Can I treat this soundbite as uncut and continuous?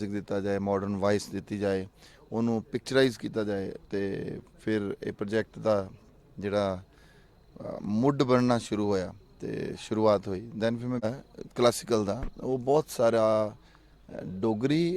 no; 1 cut; at 11.0 s

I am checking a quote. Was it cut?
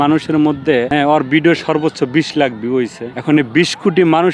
yes; 2 cuts; at 0.9 s, 3.1 s

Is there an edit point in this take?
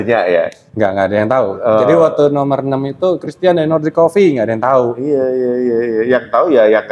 no; 0 cuts

